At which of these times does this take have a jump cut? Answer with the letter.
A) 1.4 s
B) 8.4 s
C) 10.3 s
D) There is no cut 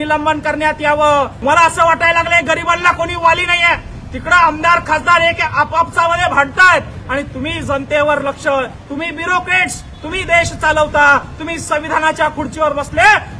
A